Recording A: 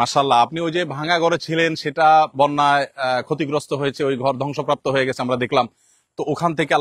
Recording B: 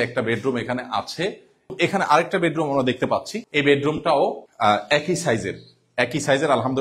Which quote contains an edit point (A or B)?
B